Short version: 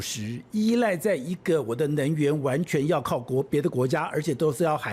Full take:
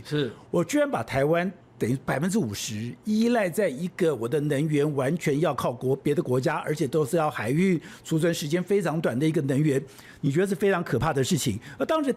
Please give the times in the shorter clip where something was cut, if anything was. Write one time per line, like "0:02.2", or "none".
none